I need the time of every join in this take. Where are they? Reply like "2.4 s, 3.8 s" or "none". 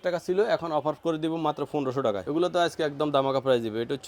2.2 s